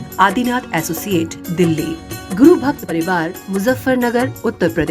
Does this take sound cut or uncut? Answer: cut